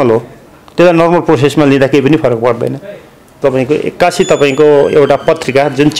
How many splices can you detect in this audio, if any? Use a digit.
1